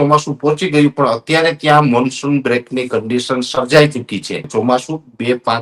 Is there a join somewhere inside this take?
yes; 1 cut; at 4.4 s

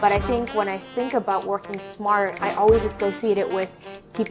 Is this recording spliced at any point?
no; 0 cuts

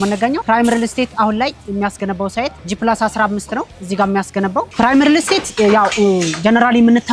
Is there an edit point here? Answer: yes; 1 cut; at 4.7 s

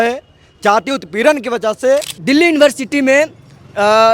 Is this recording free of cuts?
no; 1 cut; at 2.1 s

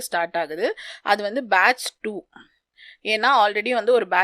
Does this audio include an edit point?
no; 0 cuts

